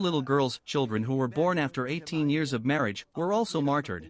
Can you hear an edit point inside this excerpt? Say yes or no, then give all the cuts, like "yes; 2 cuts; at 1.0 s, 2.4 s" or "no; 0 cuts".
yes; 1 cut; at 1.0 s